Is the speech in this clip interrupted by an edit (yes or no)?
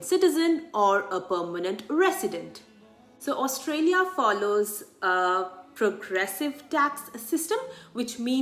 yes